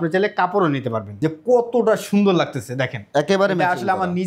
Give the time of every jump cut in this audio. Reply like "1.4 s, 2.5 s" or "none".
1.0 s